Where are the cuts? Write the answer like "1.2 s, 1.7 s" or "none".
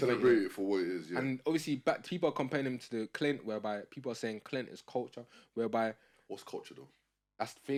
none